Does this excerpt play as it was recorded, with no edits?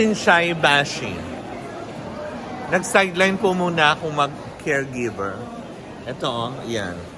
yes; 0 cuts

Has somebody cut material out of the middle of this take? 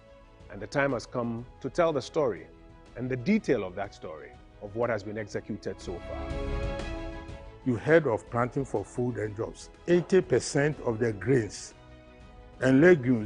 no; 0 cuts

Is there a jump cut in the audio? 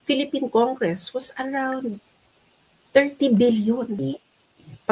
yes; 1 cut; at 4.0 s

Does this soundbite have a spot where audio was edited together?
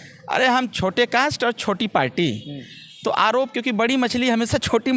no; 0 cuts

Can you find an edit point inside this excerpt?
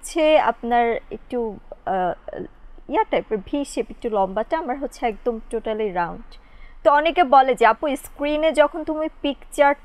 no; 0 cuts

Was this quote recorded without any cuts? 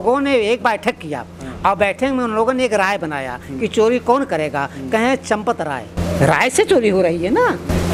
yes; 0 cuts

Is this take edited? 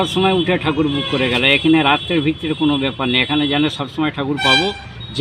no; 0 cuts

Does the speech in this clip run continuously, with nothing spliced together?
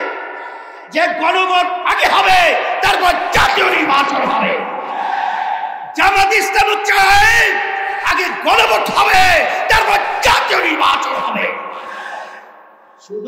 yes; 0 cuts

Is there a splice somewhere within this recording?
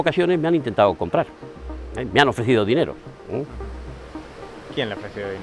no; 0 cuts

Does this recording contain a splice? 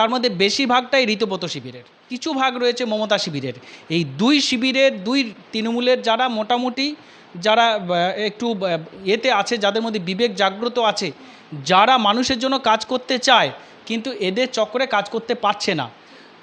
yes; 1 cut; at 2.1 s

